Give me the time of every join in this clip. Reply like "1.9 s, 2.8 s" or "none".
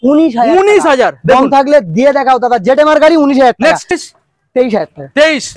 4.0 s